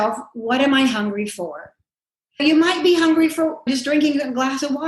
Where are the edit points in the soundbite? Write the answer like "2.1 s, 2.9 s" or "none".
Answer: 2.4 s, 3.7 s

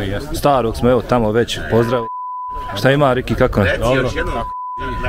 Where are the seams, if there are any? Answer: none

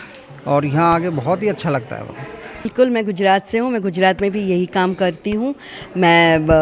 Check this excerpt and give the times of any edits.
2.7 s

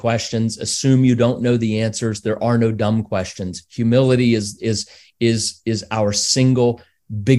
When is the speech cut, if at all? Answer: none

